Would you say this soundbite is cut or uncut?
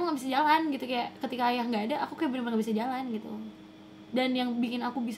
uncut